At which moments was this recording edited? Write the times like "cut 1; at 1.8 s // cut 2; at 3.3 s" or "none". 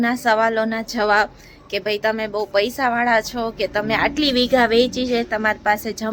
none